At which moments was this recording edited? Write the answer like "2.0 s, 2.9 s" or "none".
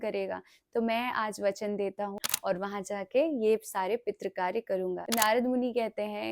2.2 s, 5.0 s

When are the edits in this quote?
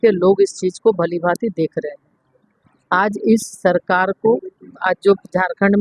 none

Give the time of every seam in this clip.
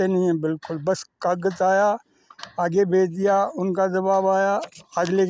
none

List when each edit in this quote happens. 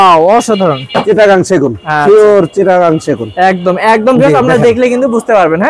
1.0 s

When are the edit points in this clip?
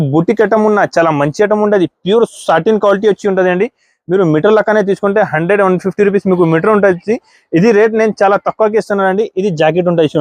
none

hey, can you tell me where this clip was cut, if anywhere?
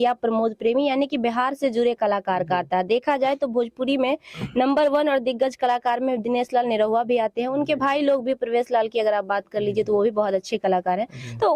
none

